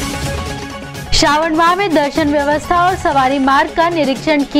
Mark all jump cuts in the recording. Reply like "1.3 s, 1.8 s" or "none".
1.0 s